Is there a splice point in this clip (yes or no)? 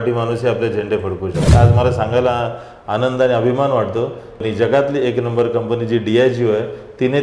yes